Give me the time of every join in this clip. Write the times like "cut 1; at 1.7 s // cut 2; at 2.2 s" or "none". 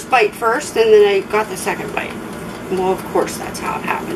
none